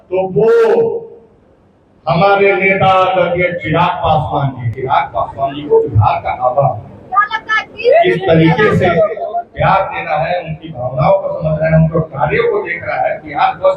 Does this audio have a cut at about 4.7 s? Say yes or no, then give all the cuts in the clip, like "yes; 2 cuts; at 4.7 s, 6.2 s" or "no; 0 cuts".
yes; 1 cut; at 4.7 s